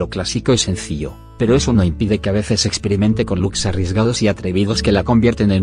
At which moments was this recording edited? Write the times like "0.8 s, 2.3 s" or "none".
2.7 s

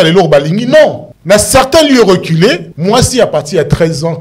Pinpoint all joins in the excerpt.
1.1 s, 2.7 s

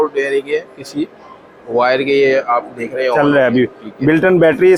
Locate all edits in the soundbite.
none

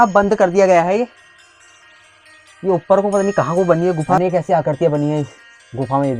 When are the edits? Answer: 4.2 s

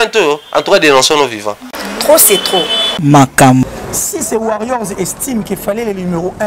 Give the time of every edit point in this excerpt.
3.8 s

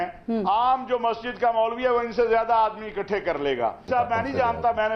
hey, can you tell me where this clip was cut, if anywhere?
3.8 s

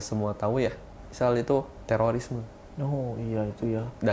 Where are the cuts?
1.8 s

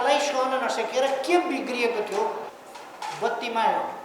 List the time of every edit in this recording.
2.5 s

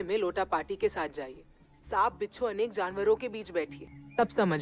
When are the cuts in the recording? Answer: none

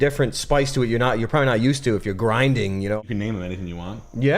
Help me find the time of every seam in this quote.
3.0 s

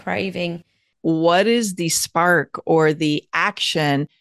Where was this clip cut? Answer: 0.9 s

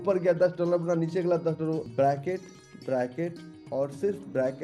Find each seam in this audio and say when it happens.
1.9 s

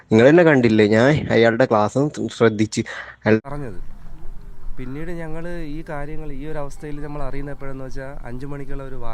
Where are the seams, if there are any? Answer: 3.4 s

